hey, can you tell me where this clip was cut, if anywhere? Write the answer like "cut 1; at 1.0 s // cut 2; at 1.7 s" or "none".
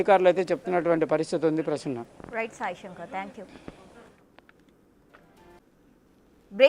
cut 1; at 5.7 s